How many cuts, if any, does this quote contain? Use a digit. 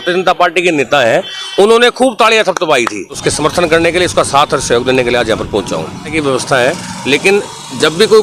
2